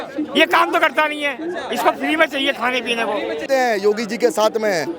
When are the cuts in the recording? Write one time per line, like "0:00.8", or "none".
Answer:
0:03.4